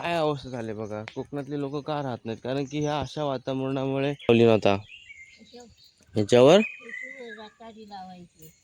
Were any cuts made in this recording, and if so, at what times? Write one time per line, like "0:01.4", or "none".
0:04.3